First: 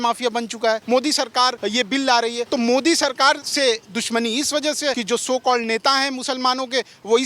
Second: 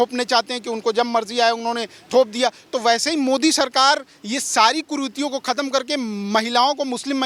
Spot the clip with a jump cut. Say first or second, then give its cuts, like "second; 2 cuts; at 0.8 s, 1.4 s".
first; 4 cuts; at 0.8 s, 2.2 s, 3.5 s, 5.0 s